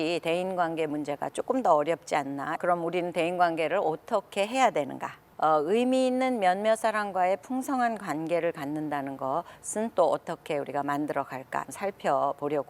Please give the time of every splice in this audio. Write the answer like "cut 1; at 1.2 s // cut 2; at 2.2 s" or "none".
cut 1; at 2.6 s // cut 2; at 5.3 s // cut 3; at 11.7 s